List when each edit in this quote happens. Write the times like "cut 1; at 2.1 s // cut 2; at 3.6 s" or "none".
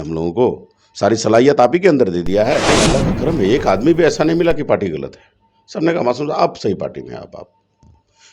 cut 1; at 2.7 s

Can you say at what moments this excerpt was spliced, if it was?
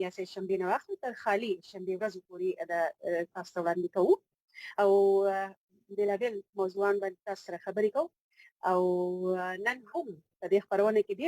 cut 1; at 7.2 s

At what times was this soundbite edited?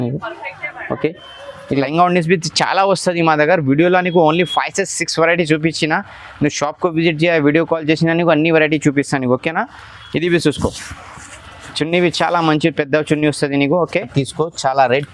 cut 1; at 1.8 s // cut 2; at 14.1 s

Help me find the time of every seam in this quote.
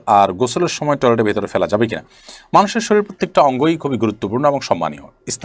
none

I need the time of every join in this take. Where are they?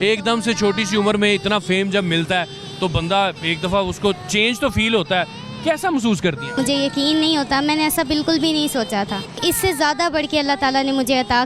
cut 1; at 6.6 s // cut 2; at 9.4 s

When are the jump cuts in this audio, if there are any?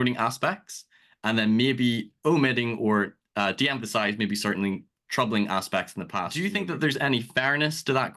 cut 1; at 6.3 s

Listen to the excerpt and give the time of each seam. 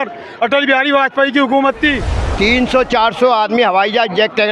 cut 1; at 2.3 s

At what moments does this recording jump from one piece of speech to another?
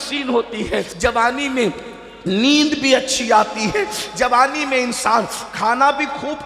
cut 1; at 0.9 s

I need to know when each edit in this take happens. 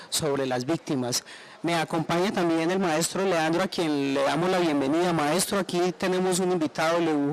cut 1; at 2.6 s

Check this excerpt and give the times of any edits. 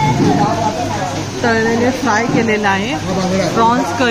none

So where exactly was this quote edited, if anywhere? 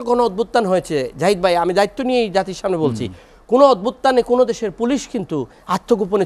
none

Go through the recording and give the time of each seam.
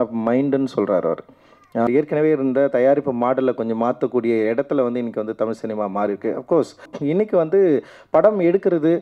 cut 1; at 1.9 s // cut 2; at 6.9 s

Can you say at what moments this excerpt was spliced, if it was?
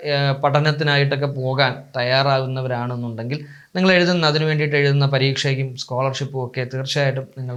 none

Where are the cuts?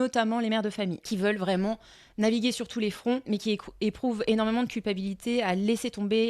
cut 1; at 1.0 s // cut 2; at 3.2 s

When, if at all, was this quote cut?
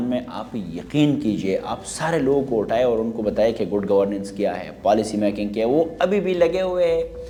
none

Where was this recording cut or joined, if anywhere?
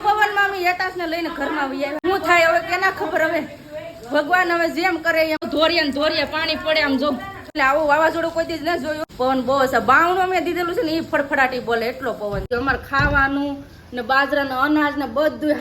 cut 1; at 2.0 s // cut 2; at 5.4 s // cut 3; at 7.6 s // cut 4; at 9.0 s // cut 5; at 12.5 s

